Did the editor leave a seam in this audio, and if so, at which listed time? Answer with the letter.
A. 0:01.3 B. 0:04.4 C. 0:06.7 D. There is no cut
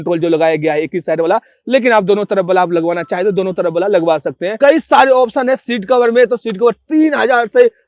B